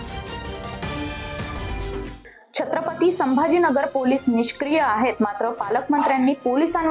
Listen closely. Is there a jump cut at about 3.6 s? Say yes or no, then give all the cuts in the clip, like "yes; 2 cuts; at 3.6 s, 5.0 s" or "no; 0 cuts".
no; 1 cut; at 2.1 s